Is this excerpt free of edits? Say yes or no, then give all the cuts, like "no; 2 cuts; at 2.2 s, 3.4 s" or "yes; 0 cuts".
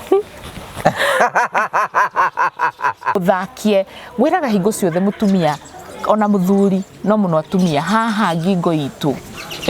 no; 1 cut; at 3.2 s